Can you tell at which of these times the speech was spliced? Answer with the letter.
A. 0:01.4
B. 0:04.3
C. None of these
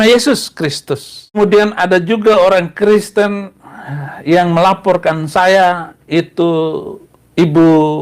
A